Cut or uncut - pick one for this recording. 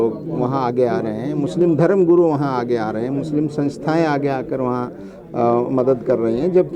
uncut